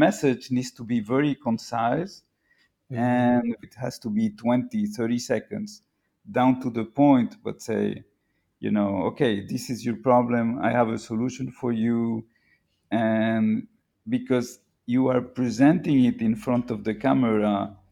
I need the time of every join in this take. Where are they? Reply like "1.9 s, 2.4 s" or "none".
3.6 s